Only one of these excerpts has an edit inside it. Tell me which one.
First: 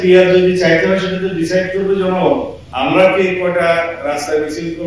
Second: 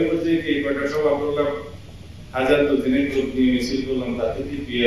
first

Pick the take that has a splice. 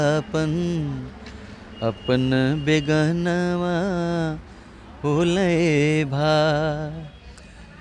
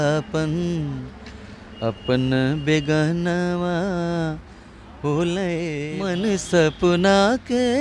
second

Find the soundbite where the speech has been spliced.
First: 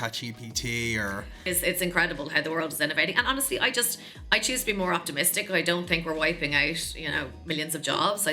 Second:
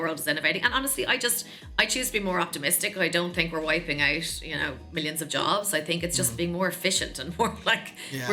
first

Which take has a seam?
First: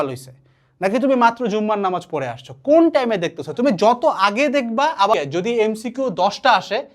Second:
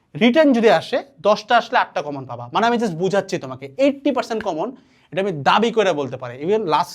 first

